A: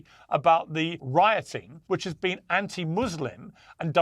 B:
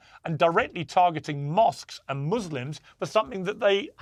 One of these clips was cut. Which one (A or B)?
A